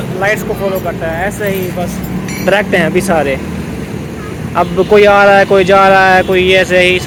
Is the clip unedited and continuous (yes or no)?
yes